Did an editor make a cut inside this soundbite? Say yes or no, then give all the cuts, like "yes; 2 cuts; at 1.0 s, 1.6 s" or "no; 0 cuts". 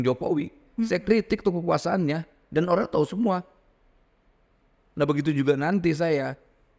no; 0 cuts